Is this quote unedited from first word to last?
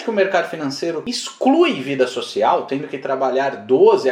yes; 0 cuts

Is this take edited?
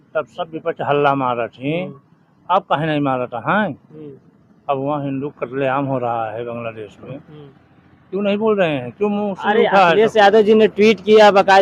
no; 0 cuts

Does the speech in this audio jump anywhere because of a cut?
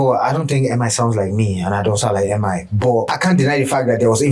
yes; 1 cut; at 3.1 s

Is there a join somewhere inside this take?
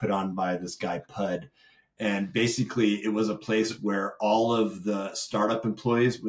no; 0 cuts

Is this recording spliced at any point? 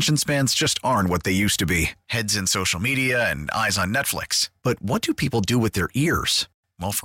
no; 0 cuts

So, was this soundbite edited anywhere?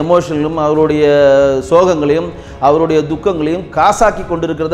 no; 0 cuts

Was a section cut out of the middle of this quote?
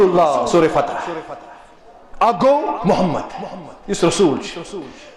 no; 0 cuts

